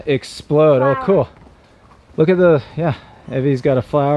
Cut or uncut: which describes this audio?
uncut